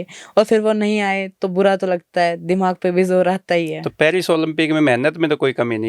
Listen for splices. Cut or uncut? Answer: uncut